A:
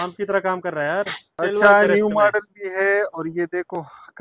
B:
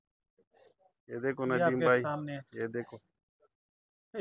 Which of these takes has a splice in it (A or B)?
A